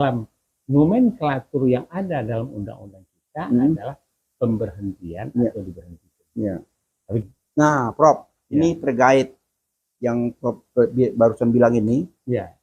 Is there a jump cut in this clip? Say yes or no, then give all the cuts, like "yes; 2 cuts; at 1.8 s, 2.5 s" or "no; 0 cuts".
yes; 1 cut; at 7.2 s